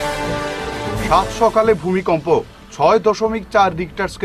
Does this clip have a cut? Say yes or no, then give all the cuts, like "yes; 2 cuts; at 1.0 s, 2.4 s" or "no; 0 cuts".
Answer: no; 0 cuts